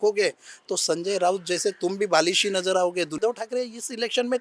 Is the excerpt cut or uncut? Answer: cut